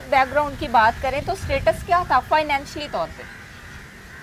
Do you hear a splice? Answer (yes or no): no